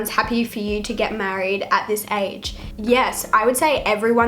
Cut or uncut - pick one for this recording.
uncut